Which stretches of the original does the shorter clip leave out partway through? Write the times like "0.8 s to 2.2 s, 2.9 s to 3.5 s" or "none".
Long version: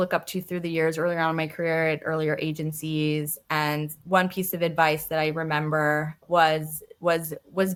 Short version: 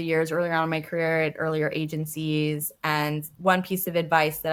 none